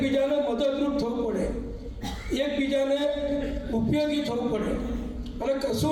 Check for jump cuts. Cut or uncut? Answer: uncut